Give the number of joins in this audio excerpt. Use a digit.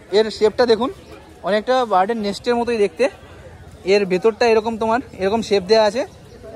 0